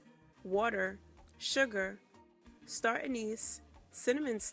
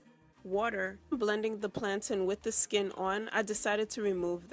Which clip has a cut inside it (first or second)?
first